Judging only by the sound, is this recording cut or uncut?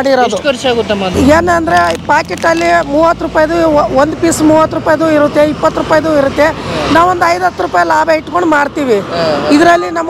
cut